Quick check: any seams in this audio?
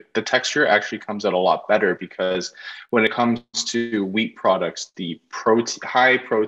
yes; 1 cut; at 3.1 s

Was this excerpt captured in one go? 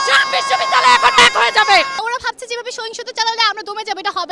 yes; 0 cuts

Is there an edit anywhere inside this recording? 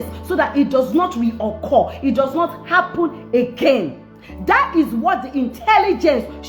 no; 0 cuts

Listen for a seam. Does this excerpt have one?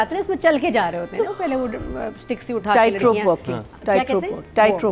no; 0 cuts

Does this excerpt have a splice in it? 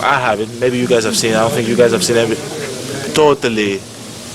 yes; 1 cut; at 3.1 s

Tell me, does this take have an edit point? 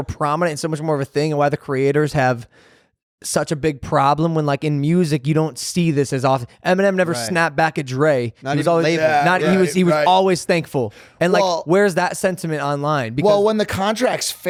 no; 0 cuts

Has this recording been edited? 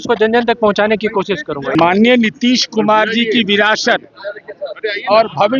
yes; 1 cut; at 1.7 s

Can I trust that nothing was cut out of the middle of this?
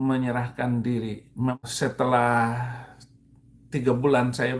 no; 1 cut; at 1.6 s

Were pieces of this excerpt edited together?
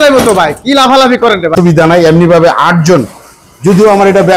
yes; 1 cut; at 1.5 s

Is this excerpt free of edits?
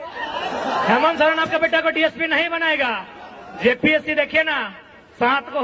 yes; 0 cuts

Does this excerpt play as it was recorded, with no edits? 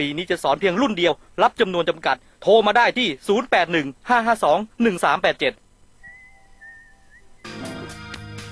no; 1 cut; at 7.4 s

